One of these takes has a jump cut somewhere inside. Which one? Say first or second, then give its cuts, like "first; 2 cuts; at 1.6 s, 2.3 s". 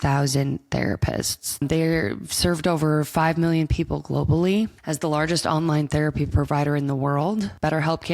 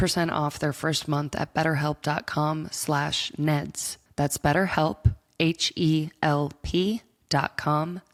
first; 2 cuts; at 1.5 s, 4.8 s